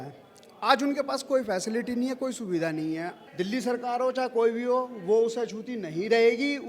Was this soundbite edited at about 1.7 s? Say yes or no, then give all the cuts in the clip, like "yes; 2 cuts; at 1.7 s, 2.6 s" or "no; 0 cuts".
no; 1 cut; at 3.2 s